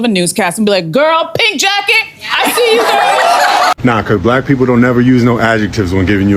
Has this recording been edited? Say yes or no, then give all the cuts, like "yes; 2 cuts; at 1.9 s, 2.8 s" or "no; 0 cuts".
yes; 1 cut; at 3.7 s